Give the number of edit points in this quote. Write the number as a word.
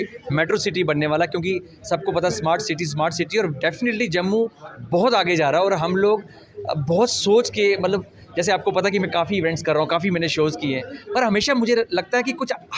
zero